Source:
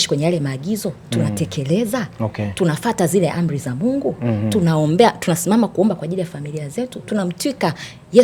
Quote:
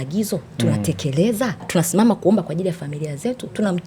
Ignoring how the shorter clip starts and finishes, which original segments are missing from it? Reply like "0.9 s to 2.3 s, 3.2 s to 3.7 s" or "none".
2.2 s to 5.2 s